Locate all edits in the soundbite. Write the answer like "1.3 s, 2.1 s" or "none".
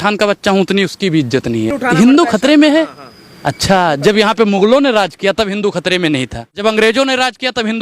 1.8 s, 6.6 s